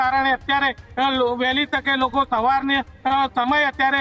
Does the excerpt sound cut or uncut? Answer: uncut